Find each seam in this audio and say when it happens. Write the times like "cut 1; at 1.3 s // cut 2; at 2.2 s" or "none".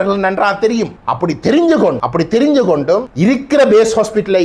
cut 1; at 1.0 s // cut 2; at 2.0 s // cut 3; at 3.1 s